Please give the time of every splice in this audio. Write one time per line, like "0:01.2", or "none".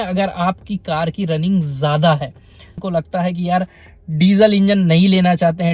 0:02.8